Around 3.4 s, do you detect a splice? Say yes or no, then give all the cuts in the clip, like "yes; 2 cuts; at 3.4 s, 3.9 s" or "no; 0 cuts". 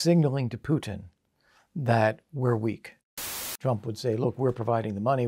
yes; 1 cut; at 3.4 s